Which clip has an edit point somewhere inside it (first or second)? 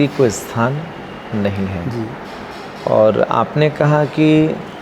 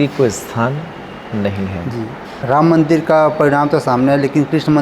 second